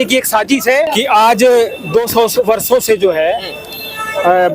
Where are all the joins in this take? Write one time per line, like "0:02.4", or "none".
0:00.9